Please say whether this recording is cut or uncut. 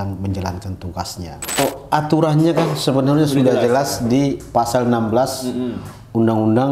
cut